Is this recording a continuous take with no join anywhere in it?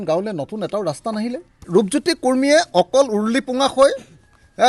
no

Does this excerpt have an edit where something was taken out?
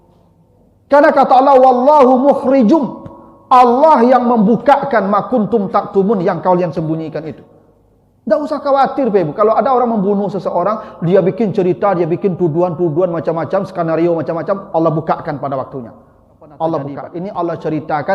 yes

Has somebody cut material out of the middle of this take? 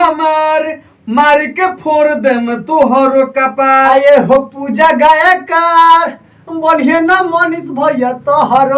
yes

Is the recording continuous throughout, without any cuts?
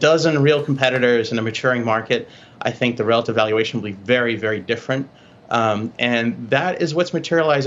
yes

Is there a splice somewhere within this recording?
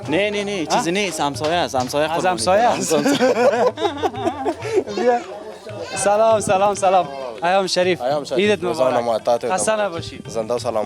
no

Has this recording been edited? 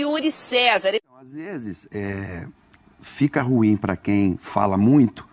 yes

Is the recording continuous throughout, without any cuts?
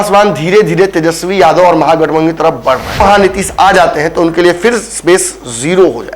no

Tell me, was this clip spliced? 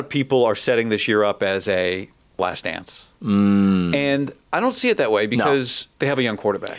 yes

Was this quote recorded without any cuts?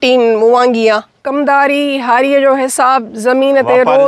no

